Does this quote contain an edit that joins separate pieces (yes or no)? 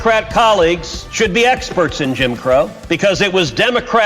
yes